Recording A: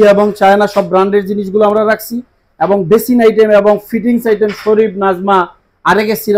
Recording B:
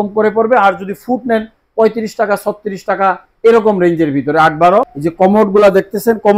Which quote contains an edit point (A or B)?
B